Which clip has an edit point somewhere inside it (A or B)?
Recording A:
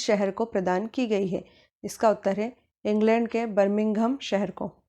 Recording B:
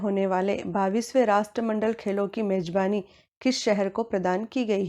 B